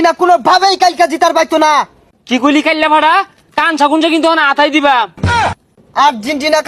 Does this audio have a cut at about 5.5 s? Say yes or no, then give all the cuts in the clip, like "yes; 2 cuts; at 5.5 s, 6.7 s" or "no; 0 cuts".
yes; 2 cuts; at 2.0 s, 5.5 s